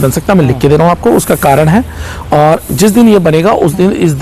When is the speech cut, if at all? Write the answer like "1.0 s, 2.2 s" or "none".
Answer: none